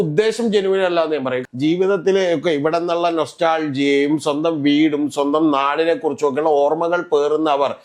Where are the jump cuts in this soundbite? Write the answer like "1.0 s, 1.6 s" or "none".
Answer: 1.4 s